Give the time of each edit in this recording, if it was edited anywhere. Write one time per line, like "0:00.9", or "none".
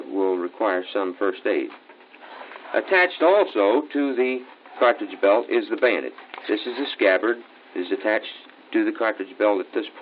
0:03.8